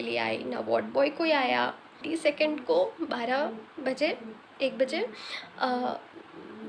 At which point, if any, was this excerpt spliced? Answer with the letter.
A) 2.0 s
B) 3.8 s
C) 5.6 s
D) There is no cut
A